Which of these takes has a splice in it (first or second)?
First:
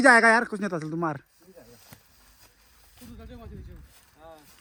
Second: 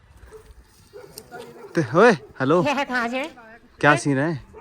second